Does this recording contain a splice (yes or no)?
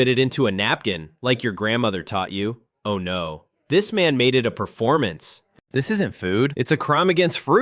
yes